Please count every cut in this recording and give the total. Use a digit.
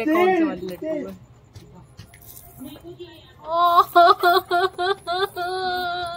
0